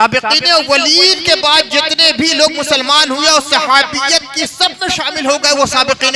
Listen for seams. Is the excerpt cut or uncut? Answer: uncut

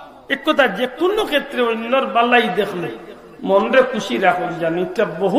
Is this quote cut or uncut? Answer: uncut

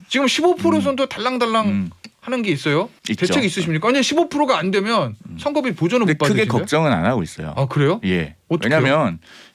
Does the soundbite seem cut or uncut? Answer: cut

